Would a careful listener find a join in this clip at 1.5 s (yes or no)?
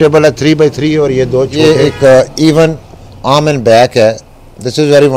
yes